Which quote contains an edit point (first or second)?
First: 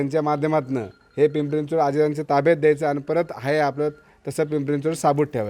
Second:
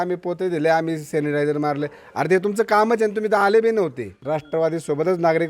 second